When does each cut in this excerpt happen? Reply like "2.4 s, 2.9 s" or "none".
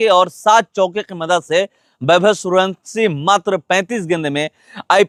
none